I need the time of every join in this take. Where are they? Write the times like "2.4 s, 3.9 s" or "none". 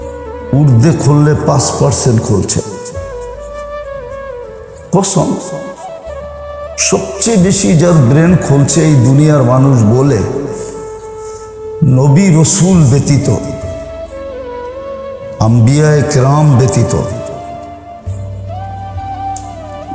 10.5 s, 11.8 s, 13.7 s, 15.4 s